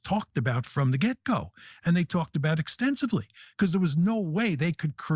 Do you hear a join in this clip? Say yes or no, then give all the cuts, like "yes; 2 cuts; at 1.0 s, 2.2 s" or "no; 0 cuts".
no; 0 cuts